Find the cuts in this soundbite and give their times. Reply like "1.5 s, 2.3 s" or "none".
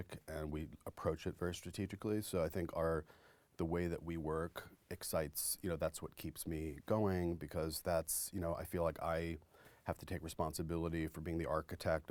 none